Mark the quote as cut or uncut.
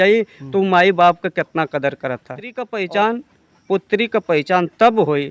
cut